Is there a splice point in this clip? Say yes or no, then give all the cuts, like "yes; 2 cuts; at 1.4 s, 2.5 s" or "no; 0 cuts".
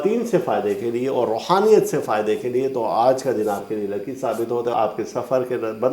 yes; 1 cut; at 4.7 s